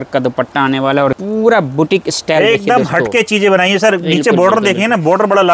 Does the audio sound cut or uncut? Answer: cut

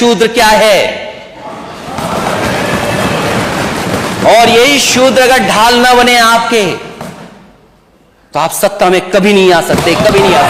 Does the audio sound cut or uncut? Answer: uncut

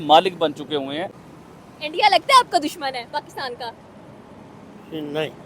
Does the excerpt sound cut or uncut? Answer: cut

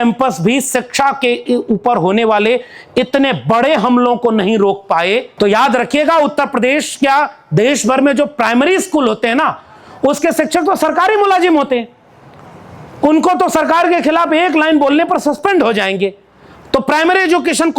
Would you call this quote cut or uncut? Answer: cut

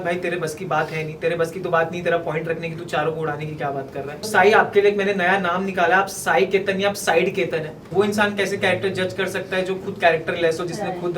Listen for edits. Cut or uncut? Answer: cut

